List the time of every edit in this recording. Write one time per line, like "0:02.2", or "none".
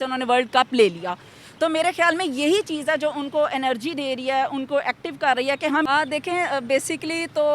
0:05.9